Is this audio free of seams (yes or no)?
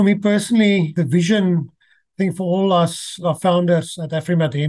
no